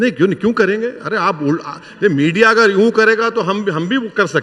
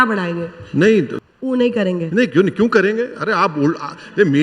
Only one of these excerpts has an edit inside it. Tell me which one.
second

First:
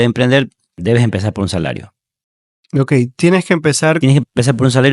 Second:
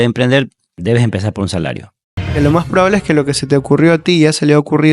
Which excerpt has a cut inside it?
second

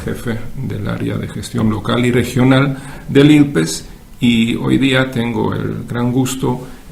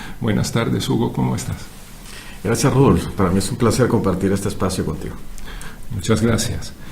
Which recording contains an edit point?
second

